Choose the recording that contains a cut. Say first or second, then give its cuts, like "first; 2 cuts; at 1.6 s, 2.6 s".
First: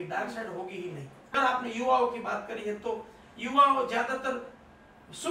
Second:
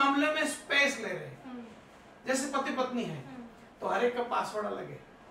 first; 1 cut; at 1.2 s